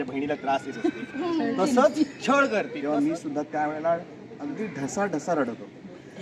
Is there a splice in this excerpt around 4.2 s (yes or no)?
no